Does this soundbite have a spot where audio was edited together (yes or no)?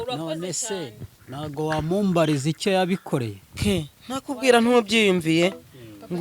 yes